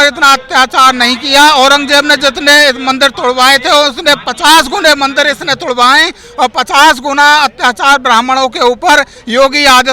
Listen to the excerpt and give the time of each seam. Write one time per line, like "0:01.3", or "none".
none